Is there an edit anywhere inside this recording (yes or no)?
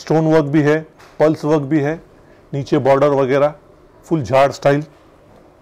no